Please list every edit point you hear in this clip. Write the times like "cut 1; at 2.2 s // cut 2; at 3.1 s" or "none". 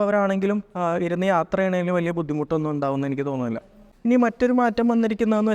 cut 1; at 3.8 s